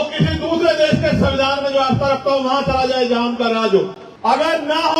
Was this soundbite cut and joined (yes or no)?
yes